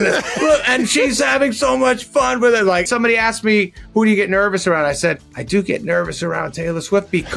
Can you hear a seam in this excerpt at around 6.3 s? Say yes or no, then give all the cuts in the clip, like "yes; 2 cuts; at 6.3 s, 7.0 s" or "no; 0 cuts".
no; 1 cut; at 2.9 s